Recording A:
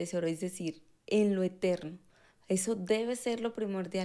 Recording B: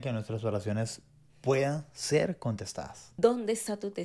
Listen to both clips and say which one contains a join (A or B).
B